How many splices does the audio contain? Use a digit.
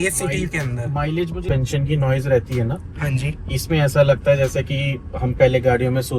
1